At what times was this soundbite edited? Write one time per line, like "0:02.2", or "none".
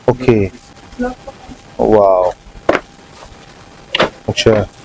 0:01.2

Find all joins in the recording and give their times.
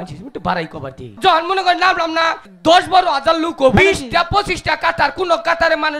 0:01.2
0:02.4
0:03.8

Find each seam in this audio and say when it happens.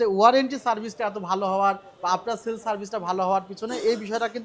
none

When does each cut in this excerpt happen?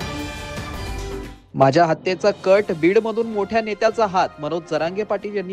0:01.2

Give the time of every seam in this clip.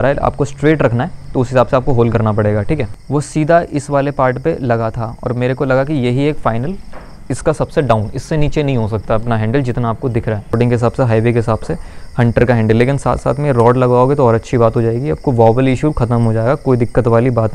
0:02.9
0:10.6

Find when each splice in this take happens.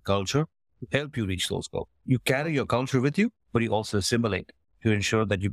none

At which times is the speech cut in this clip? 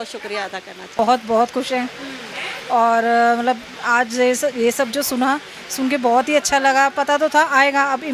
0:01.0

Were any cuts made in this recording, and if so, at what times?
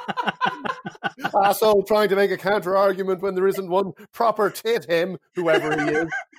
none

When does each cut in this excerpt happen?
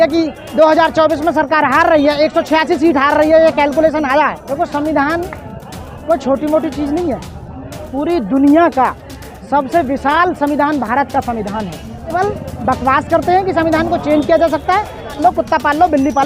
0:04.4
0:12.1
0:15.2

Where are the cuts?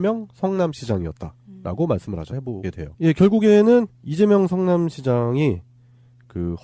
none

